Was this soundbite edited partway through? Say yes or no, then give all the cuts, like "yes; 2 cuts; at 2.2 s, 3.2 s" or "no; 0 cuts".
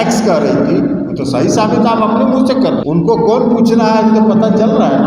yes; 1 cut; at 2.8 s